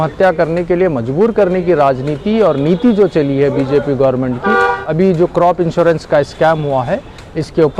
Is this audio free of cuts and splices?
no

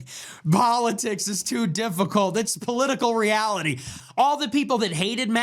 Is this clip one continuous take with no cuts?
no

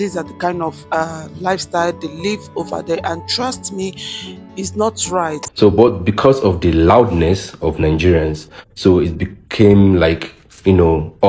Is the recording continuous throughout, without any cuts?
no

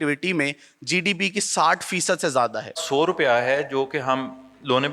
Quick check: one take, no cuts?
no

